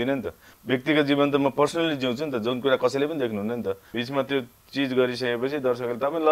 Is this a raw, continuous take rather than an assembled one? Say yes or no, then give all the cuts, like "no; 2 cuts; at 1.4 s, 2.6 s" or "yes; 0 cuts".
no; 1 cut; at 3.9 s